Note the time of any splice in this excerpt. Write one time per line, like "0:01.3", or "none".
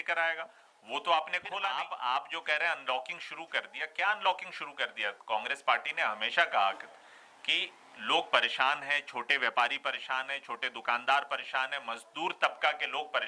0:01.8